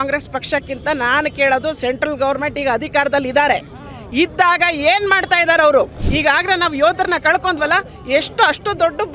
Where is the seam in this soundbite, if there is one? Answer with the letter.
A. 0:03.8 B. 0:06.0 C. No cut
B